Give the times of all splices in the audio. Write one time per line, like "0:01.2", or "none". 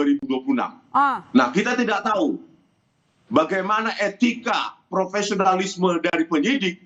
none